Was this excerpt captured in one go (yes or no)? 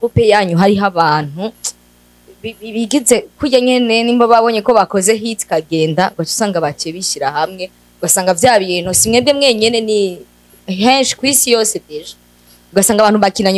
yes